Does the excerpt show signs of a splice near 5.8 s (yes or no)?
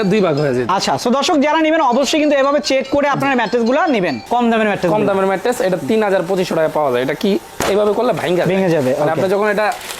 no